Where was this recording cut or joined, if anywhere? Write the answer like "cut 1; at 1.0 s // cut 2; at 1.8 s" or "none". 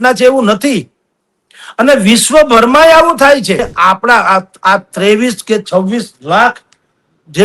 cut 1; at 3.6 s